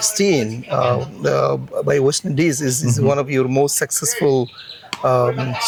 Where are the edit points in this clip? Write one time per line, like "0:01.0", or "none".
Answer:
none